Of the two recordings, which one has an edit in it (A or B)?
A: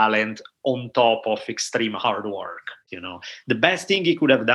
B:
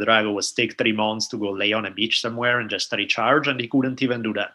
A